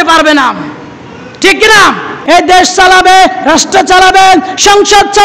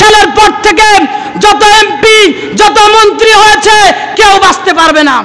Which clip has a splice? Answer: first; 1 cut; at 2.2 s

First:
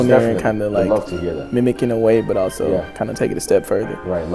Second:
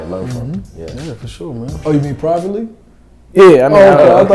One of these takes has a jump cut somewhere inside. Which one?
second; 1 cut; at 1.8 s

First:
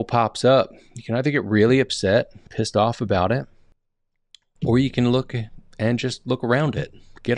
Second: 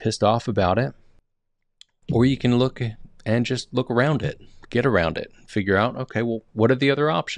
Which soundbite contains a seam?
second; 1 cut; at 6.5 s

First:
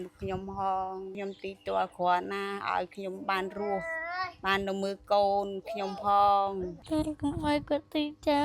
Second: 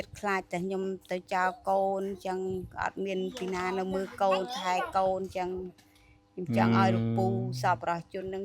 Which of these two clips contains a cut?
first; 1 cut; at 6.8 s

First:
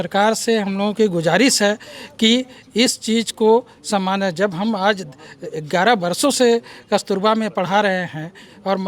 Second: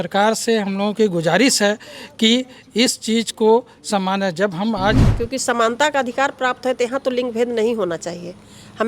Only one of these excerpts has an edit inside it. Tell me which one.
second; 1 cut; at 5.1 s

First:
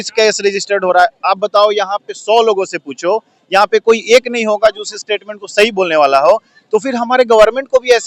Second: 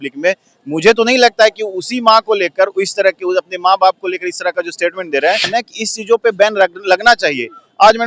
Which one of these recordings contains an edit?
second; 1 cut; at 5.5 s

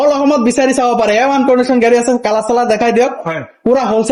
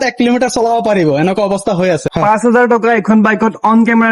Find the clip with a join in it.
second; 1 cut; at 2.1 s

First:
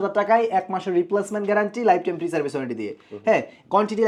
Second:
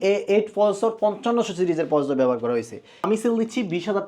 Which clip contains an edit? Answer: second; 1 cut; at 3.0 s

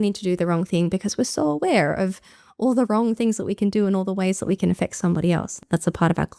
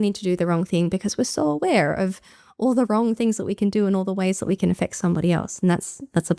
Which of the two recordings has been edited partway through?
first; 1 cut; at 5.5 s

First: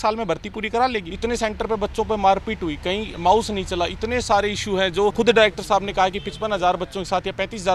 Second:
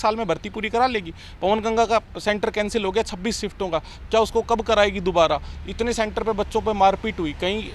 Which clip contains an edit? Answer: first; 3 cuts; at 1.1 s, 3.1 s, 5.1 s

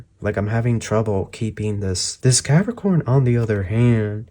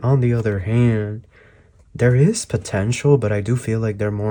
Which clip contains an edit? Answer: first; 1 cut; at 2.1 s

